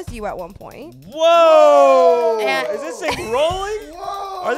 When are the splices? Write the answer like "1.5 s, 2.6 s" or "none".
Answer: none

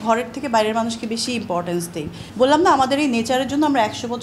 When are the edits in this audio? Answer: 2.2 s

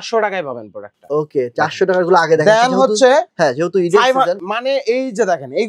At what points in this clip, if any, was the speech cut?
none

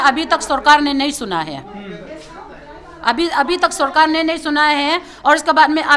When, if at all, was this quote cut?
none

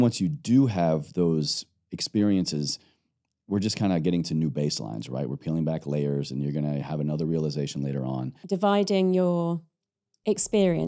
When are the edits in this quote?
8.3 s

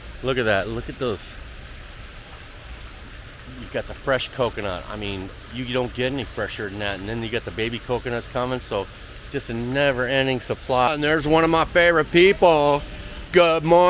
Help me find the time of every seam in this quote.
10.9 s

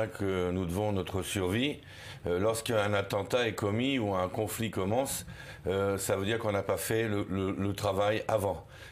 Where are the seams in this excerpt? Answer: 1.3 s

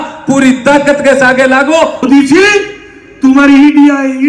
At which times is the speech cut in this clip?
2.0 s

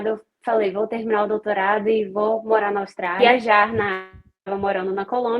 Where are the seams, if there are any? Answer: 3.2 s

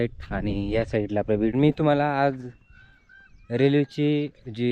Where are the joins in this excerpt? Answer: 1.5 s

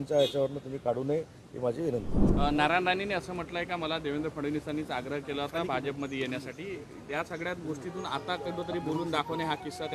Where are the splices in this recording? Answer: 2.2 s

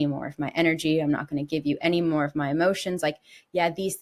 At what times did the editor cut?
none

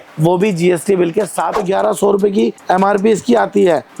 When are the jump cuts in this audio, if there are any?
1.6 s

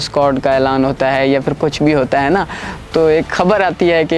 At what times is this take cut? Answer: none

